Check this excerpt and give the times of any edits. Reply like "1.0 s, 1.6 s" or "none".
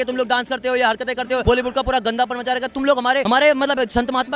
1.4 s, 3.2 s